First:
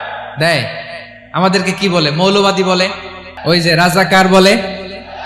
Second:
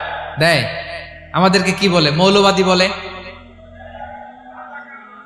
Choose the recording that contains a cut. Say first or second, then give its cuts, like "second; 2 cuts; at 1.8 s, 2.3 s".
first; 1 cut; at 3.3 s